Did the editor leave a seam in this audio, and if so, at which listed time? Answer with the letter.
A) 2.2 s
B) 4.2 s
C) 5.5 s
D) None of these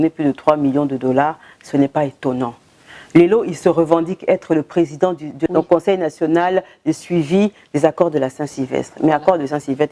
C